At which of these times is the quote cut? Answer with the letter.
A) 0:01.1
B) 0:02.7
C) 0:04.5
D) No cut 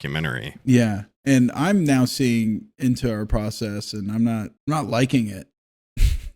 C